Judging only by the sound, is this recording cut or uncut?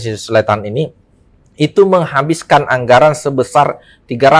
uncut